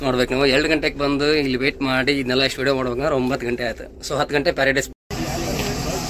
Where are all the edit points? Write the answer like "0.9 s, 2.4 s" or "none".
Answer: 5.0 s